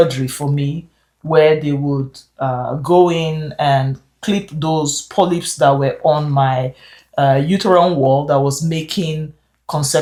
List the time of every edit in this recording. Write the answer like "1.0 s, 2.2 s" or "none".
none

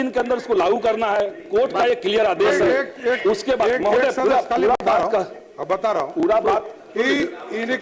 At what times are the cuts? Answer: none

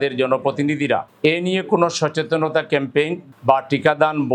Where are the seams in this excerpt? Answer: none

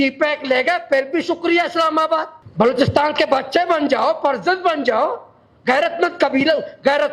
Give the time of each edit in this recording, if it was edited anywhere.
2.4 s

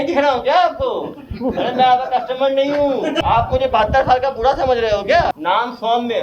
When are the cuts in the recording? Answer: 3.2 s, 5.3 s

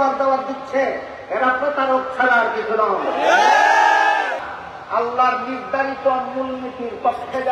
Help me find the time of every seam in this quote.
4.4 s

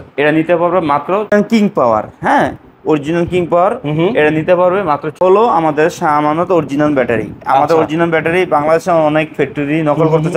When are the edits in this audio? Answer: 1.3 s, 5.2 s

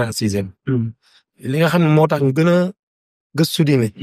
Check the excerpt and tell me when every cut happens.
1.3 s

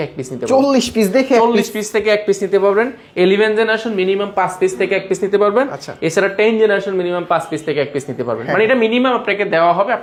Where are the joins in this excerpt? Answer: none

